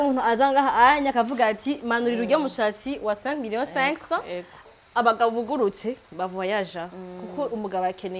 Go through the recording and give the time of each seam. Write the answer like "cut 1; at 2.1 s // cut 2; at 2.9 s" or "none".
cut 1; at 4.7 s